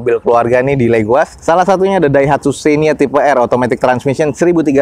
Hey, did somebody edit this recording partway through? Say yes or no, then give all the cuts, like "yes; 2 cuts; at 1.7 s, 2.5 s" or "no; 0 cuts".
no; 0 cuts